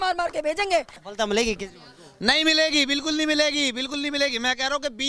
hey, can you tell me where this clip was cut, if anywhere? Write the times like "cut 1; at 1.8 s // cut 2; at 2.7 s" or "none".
cut 1; at 1.0 s